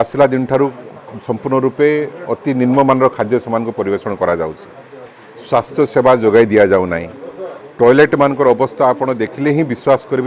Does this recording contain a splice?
no; 0 cuts

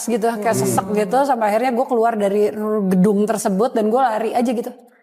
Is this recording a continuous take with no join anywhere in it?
yes; 0 cuts

